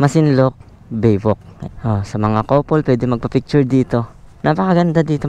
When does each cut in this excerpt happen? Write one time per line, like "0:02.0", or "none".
none